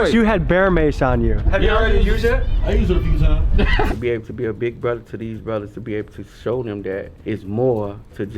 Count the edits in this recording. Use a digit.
3